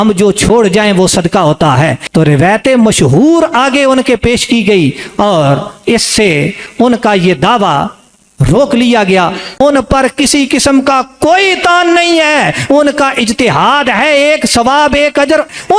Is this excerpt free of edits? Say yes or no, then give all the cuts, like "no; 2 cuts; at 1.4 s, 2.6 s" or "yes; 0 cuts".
no; 1 cut; at 2.0 s